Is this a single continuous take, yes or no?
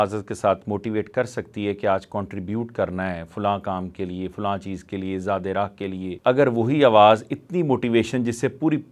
no